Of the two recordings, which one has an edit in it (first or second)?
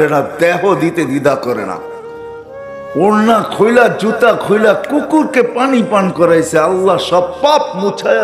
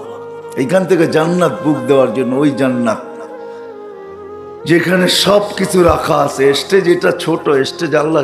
second